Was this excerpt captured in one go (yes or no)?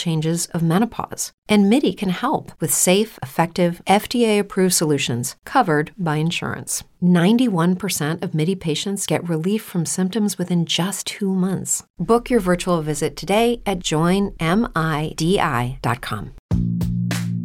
no